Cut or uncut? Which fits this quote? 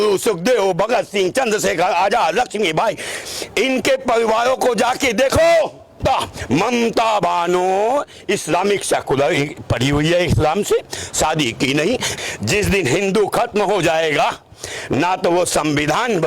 cut